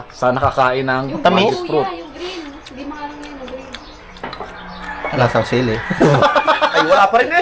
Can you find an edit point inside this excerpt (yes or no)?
no